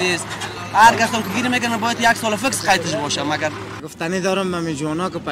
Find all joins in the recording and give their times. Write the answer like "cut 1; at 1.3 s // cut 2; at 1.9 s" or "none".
cut 1; at 3.9 s